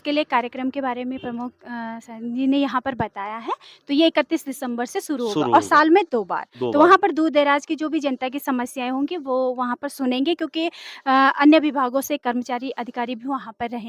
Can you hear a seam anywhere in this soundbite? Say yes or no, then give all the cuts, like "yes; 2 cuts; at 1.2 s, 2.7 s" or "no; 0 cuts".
no; 0 cuts